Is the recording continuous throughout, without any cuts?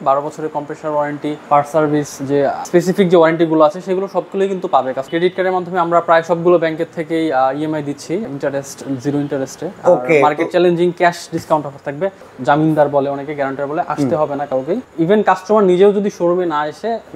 no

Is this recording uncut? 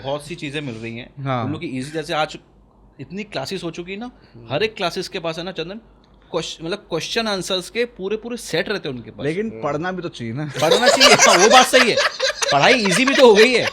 yes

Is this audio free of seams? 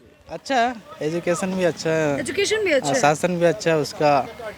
yes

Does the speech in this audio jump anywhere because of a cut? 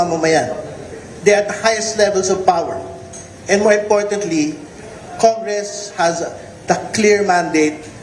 no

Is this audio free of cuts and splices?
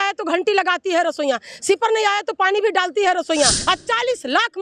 no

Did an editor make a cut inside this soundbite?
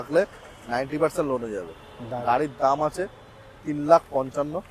no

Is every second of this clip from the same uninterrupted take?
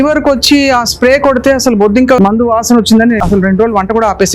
no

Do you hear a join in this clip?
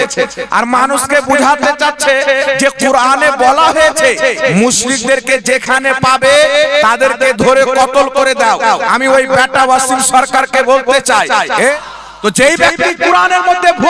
yes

